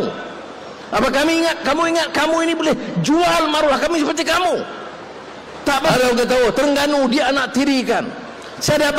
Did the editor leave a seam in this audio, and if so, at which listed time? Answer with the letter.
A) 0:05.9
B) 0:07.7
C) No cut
A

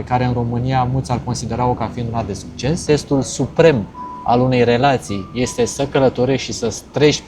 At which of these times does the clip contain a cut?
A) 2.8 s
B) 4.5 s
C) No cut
A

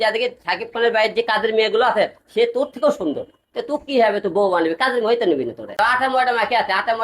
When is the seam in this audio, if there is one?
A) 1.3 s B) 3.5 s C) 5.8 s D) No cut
C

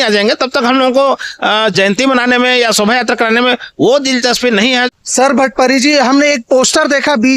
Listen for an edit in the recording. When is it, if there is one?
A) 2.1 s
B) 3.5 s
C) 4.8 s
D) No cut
C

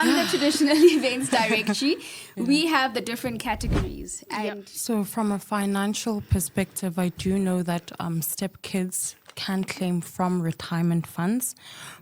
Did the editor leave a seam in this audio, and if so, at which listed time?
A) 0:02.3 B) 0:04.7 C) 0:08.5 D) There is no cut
B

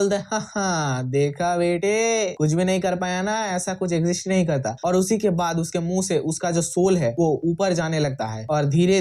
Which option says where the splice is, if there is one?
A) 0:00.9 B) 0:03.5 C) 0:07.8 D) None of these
D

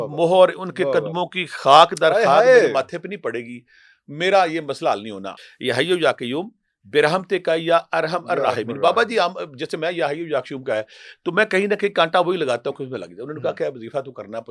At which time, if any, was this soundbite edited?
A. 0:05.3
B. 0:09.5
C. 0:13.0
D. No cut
A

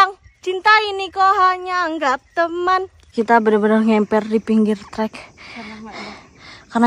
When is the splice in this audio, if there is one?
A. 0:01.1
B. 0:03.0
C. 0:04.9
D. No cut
B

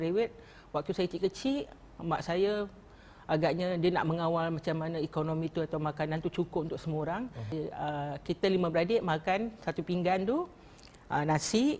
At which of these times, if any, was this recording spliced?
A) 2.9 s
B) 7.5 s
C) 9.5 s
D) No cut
B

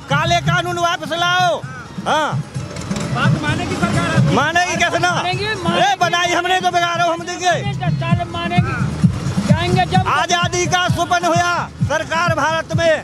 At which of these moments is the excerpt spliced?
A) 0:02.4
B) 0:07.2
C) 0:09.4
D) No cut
D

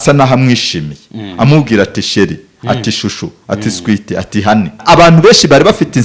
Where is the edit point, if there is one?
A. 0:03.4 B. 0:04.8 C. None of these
B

